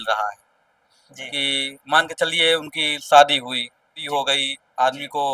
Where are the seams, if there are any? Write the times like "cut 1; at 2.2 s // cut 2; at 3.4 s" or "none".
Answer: cut 1; at 4.0 s